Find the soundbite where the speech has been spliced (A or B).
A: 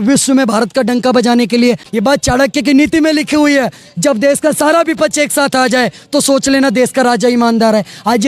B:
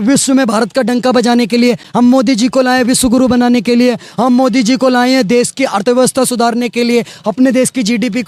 A